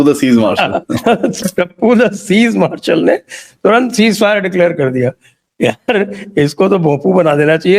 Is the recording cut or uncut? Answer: cut